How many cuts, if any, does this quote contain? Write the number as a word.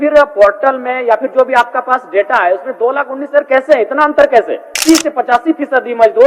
one